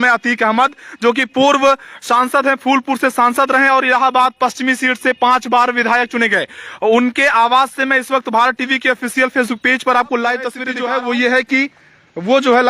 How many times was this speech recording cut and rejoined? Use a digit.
1